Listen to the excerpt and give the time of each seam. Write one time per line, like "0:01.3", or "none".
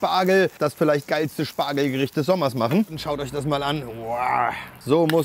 0:03.0